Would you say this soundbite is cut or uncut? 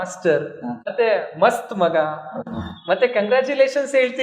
cut